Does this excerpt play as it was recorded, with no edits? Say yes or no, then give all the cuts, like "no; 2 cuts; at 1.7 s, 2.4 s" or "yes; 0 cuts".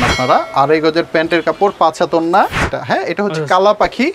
no; 1 cut; at 2.7 s